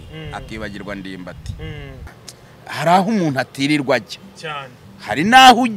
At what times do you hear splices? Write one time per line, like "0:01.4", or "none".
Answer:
0:02.1